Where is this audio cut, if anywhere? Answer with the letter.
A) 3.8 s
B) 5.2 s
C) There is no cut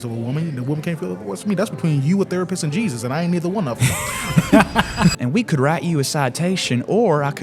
B